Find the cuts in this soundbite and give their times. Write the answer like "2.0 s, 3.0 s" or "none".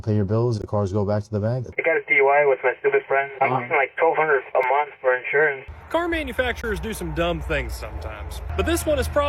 1.7 s, 5.6 s